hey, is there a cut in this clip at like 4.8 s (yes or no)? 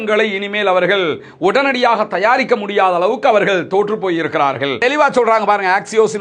yes